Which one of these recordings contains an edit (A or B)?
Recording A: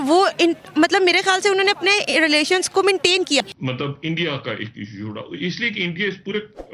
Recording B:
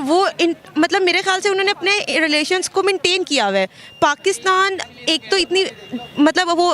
A